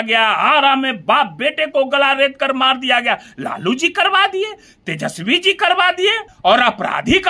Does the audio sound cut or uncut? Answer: cut